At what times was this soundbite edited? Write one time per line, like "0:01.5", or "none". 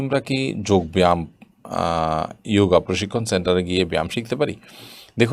none